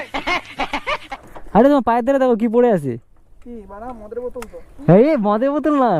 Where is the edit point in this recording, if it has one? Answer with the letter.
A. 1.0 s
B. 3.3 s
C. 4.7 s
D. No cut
A